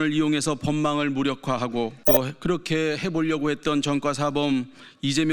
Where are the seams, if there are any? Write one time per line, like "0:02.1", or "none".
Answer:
0:02.0